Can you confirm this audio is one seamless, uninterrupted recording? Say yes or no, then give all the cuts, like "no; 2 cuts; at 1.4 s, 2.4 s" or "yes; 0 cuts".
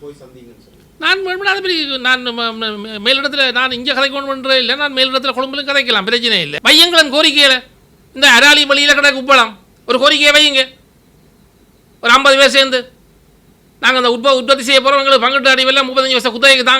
no; 1 cut; at 6.5 s